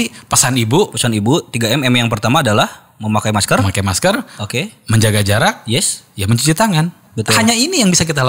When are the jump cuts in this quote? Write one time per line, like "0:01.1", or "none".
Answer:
0:07.1